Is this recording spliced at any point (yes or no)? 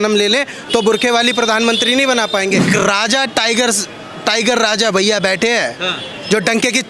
yes